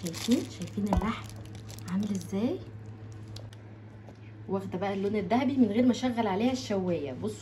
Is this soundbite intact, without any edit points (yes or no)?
no